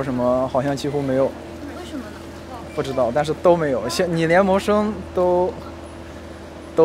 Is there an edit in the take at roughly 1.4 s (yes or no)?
no